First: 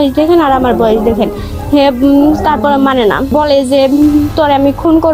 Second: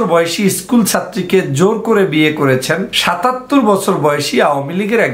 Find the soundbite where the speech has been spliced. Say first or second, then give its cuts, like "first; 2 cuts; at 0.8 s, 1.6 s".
second; 1 cut; at 2.9 s